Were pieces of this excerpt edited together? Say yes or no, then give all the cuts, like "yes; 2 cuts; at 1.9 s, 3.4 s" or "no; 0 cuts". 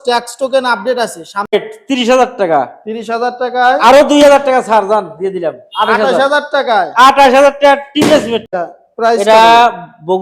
yes; 2 cuts; at 1.5 s, 8.5 s